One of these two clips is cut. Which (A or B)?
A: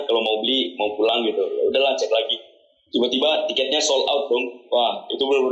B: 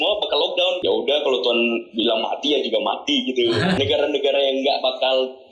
B